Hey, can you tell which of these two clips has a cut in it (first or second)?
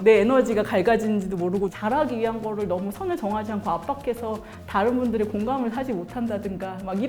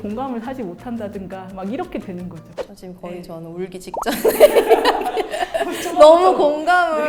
first